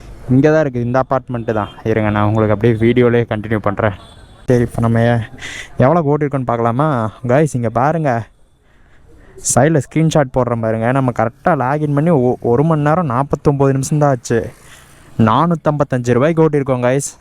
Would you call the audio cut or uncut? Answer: cut